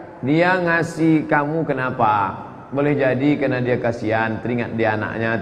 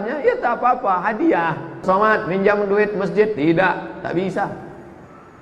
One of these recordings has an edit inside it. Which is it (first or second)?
second